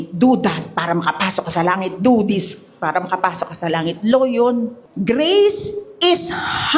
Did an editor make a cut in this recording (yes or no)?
yes